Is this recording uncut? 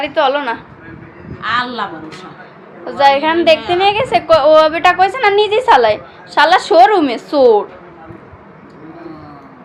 yes; 0 cuts

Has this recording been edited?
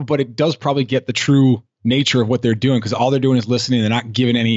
no; 0 cuts

